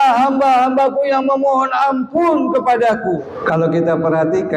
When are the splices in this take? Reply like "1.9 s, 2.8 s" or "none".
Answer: 3.3 s